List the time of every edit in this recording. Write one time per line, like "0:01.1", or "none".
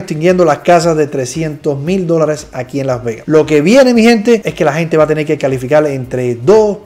none

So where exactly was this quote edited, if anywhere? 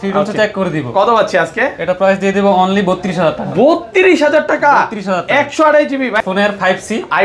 0:06.2

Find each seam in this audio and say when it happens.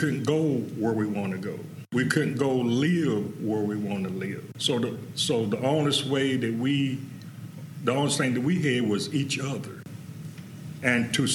0:01.8
0:04.5
0:09.8

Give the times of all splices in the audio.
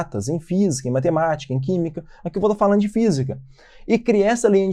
none

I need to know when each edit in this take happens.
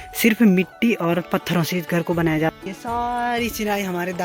0:02.5

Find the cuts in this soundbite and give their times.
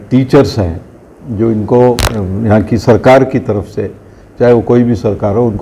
0:02.2

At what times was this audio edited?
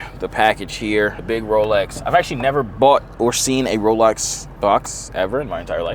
0:01.2

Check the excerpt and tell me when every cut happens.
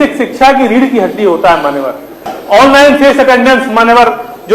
0:02.3

